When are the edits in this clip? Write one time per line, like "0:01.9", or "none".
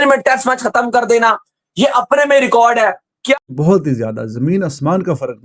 0:03.4